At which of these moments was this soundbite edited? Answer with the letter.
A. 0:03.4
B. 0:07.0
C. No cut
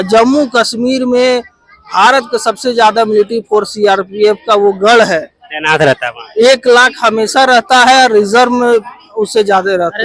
C